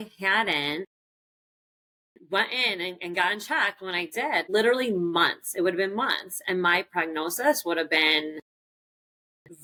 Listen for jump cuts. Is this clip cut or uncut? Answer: uncut